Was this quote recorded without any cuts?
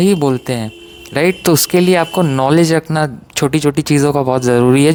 yes; 0 cuts

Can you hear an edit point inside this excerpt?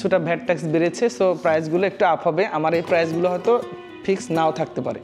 no; 0 cuts

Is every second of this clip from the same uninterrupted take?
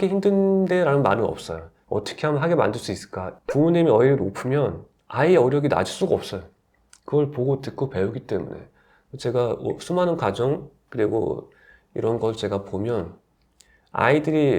no; 1 cut; at 3.2 s

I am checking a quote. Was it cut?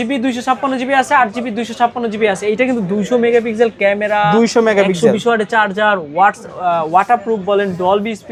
no; 0 cuts

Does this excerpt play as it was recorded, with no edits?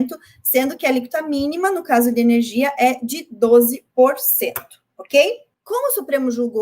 no; 1 cut; at 5.5 s

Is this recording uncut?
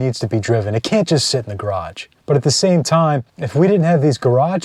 yes; 0 cuts

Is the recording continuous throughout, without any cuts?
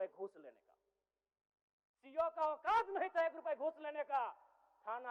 yes; 0 cuts

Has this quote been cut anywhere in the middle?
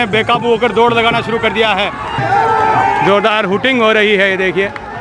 yes; 1 cut; at 2.2 s

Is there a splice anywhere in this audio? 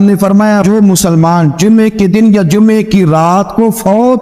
no; 0 cuts

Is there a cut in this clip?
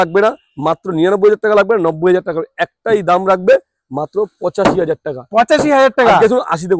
no; 0 cuts

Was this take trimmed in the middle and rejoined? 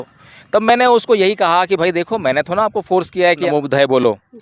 yes; 1 cut; at 3.4 s

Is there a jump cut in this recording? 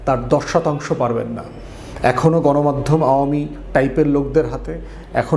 no; 0 cuts

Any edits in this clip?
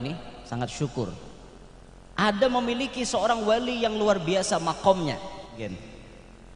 yes; 1 cut; at 5.6 s

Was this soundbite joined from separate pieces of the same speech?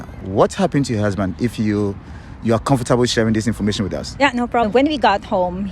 yes; 1 cut; at 4.7 s

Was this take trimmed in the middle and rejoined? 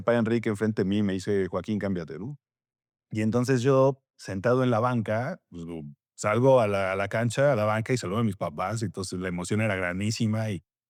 no; 0 cuts

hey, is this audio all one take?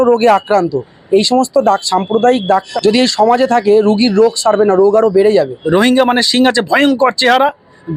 no; 2 cuts; at 2.7 s, 5.6 s

